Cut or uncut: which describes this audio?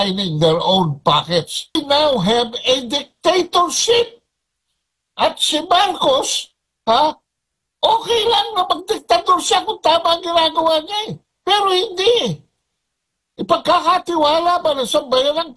cut